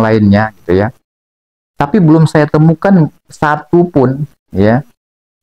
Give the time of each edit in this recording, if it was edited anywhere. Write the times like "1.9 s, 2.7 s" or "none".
none